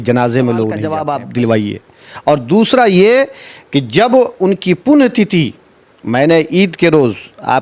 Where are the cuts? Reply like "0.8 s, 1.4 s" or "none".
1.0 s